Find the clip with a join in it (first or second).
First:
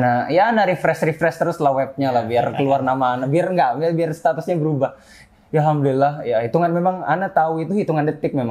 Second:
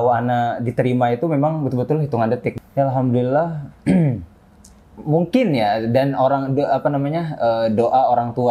second